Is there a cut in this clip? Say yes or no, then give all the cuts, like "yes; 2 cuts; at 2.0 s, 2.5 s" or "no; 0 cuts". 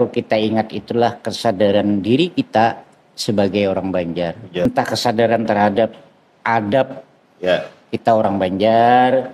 yes; 1 cut; at 4.7 s